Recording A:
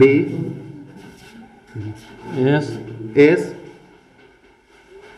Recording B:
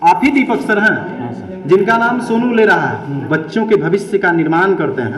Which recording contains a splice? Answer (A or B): B